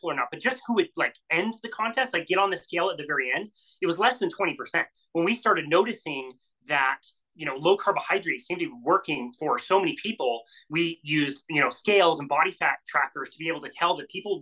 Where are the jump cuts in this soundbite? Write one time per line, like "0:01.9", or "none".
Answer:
0:05.0